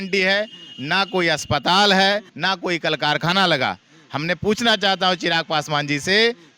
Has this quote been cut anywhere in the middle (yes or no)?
yes